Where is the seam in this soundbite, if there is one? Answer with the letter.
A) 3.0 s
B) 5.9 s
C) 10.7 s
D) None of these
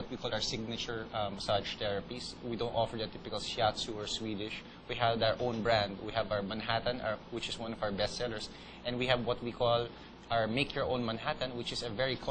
D